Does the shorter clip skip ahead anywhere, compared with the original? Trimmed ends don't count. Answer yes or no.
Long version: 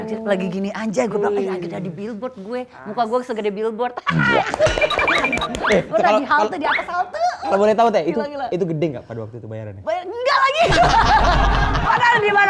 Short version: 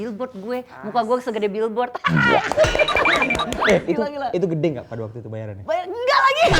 yes